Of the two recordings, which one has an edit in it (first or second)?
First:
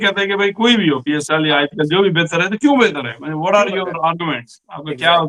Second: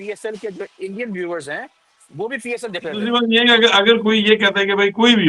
second